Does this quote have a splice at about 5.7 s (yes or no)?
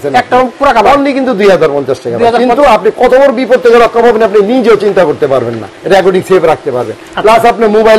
yes